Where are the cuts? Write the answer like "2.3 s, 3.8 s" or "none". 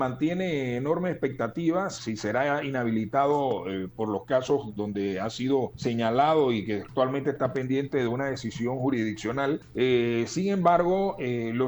2.0 s, 5.7 s, 9.7 s